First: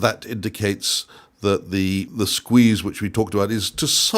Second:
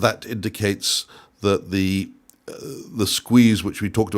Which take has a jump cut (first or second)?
first